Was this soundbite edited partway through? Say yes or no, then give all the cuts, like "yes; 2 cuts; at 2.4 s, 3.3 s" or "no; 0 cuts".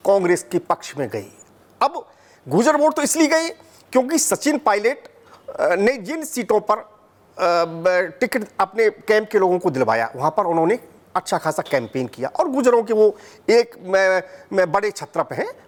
no; 0 cuts